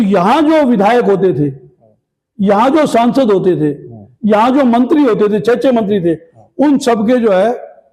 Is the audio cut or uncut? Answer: uncut